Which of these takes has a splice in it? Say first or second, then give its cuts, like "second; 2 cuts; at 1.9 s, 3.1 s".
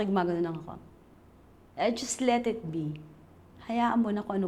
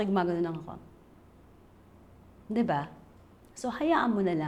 first; 1 cut; at 1.6 s